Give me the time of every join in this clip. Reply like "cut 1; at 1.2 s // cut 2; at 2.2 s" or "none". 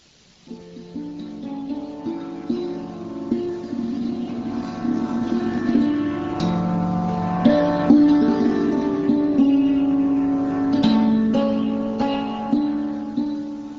cut 1; at 5.6 s